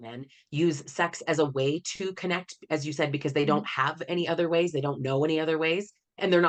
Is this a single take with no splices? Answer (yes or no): yes